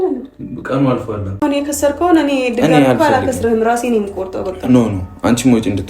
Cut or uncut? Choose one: cut